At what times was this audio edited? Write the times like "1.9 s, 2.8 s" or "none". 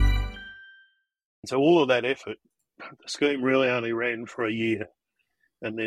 1.3 s